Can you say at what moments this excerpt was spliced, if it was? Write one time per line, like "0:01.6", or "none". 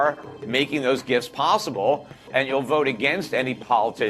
none